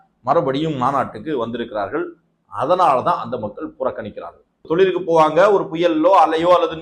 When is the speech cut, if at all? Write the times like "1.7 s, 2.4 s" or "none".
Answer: 4.6 s